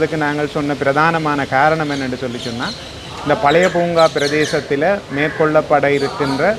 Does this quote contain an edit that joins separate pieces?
no; 0 cuts

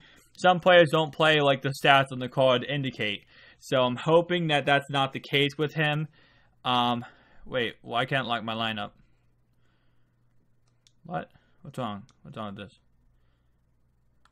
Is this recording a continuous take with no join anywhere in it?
yes; 0 cuts

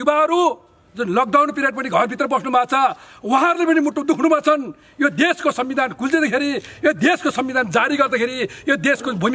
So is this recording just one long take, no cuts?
yes; 0 cuts

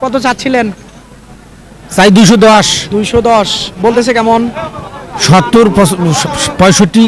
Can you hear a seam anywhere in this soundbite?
no; 0 cuts

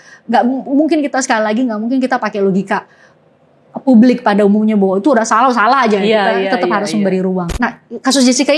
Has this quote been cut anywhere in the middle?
yes; 1 cut; at 7.5 s

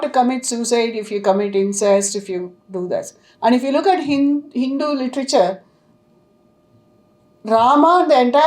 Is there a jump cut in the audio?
no; 0 cuts

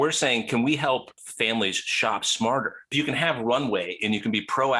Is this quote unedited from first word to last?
no; 2 cuts; at 1.2 s, 2.9 s

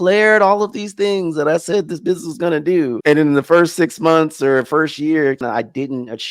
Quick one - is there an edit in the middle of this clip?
yes; 1 cut; at 5.4 s

